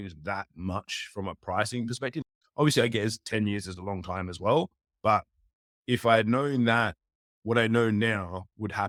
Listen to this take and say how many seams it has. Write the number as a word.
zero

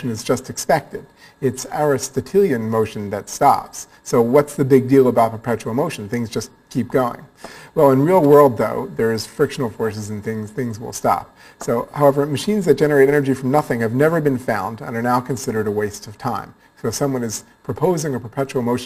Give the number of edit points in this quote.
one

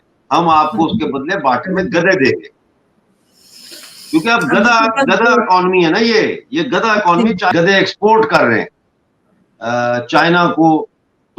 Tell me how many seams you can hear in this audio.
one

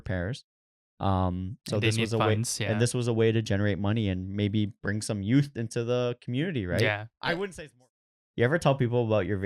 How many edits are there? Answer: one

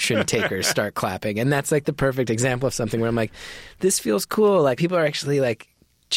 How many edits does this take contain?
one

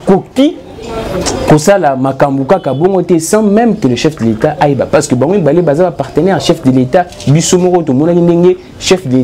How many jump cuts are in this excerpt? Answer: zero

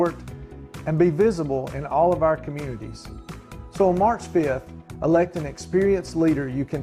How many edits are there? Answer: zero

